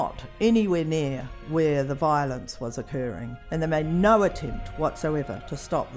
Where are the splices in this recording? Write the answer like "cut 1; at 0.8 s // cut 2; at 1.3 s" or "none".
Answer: cut 1; at 3.4 s